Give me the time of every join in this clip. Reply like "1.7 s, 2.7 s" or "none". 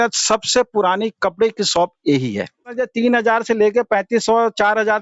2.7 s